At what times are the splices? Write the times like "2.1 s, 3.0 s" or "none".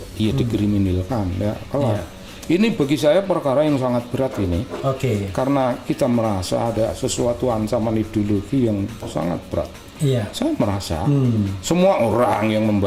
none

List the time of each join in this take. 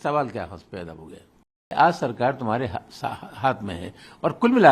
1.7 s

